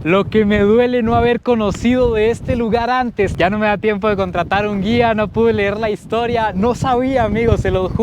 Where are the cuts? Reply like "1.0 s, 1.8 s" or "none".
3.3 s